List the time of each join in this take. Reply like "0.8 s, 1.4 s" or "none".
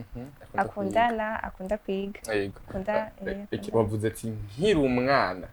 none